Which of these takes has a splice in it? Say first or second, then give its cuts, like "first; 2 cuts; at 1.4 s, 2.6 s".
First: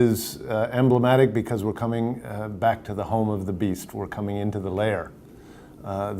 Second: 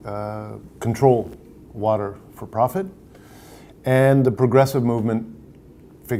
first; 1 cut; at 2.3 s